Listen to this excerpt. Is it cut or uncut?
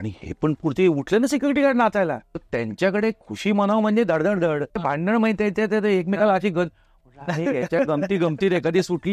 cut